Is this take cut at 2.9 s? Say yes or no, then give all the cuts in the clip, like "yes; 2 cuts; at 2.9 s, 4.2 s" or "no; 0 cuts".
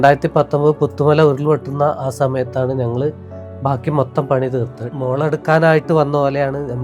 no; 1 cut; at 4.8 s